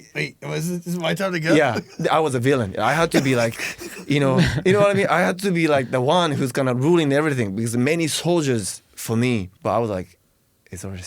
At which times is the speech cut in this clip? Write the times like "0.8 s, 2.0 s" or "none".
9.5 s